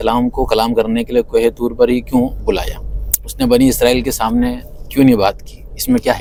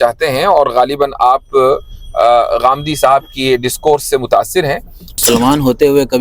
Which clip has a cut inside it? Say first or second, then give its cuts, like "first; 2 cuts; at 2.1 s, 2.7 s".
second; 1 cut; at 5.2 s